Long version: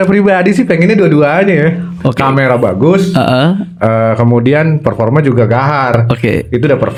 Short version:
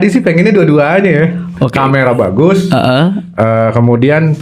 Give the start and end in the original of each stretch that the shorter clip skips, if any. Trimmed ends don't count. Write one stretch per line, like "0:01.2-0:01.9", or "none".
none